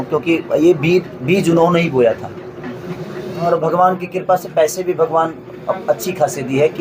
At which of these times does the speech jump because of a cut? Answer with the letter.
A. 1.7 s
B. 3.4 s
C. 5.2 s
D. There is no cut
B